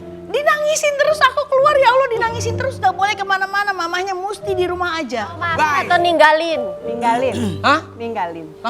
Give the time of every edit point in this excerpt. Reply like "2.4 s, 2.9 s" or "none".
5.5 s